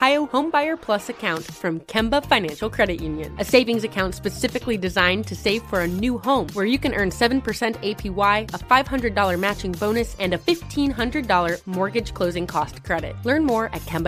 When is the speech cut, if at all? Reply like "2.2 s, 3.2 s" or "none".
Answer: none

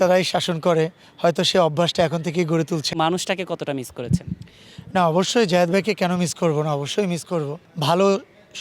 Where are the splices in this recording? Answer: 2.9 s, 7.6 s

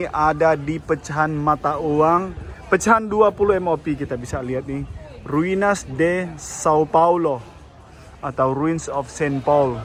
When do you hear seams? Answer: none

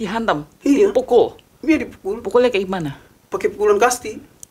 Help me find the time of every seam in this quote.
none

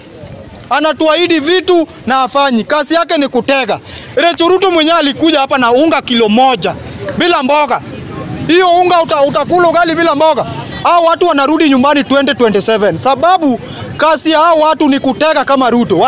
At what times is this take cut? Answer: 10.6 s

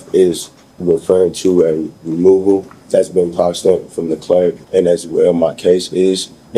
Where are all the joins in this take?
2.8 s, 4.6 s

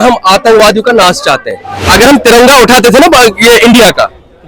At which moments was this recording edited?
1.7 s

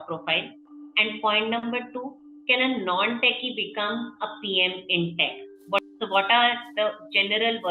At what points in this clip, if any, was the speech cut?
5.8 s

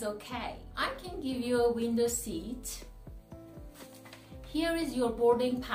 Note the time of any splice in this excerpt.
2.8 s, 4.5 s

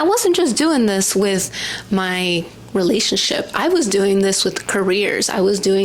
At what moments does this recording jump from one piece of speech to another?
none

